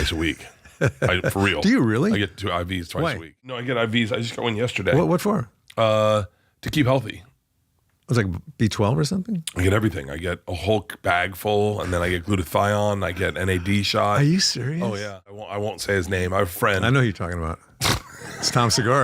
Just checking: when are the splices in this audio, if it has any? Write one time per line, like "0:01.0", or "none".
none